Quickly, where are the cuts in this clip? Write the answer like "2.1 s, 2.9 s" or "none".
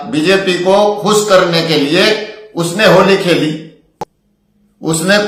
none